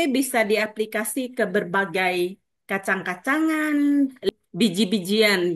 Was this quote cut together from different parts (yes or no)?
yes